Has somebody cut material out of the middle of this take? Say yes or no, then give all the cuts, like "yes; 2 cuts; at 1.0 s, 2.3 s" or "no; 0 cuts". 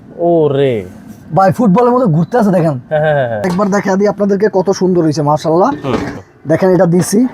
yes; 2 cuts; at 3.5 s, 6.1 s